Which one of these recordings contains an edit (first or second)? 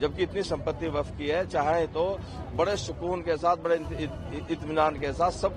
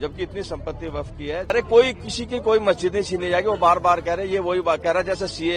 second